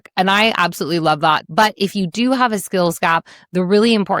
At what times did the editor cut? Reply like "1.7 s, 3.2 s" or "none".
1.5 s